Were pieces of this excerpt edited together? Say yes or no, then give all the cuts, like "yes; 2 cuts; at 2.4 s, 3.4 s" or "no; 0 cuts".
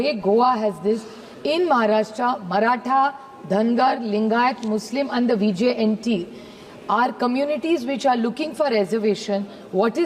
no; 0 cuts